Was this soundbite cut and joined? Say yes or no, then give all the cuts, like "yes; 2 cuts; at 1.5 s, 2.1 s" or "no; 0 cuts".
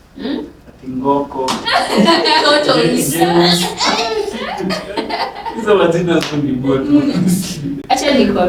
no; 0 cuts